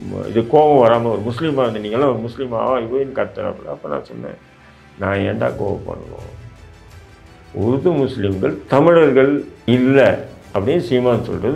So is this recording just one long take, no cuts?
no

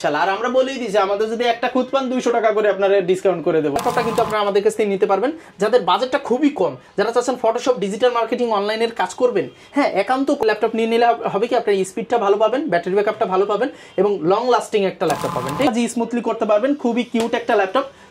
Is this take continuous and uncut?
no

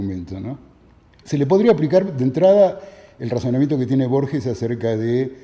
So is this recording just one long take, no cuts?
yes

